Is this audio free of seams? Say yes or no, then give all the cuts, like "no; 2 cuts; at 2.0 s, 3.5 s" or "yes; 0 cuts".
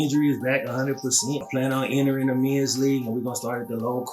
no; 1 cut; at 1.4 s